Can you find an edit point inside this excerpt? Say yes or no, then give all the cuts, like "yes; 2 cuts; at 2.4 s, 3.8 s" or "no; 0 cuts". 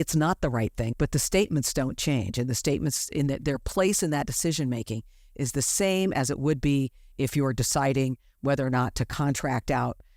yes; 1 cut; at 0.9 s